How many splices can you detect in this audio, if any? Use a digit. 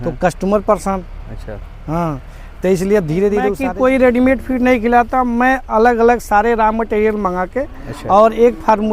1